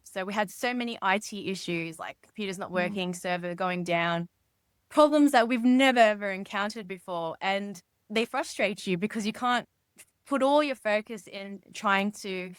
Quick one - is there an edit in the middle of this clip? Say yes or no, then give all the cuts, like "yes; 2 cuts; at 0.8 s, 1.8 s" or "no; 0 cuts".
no; 0 cuts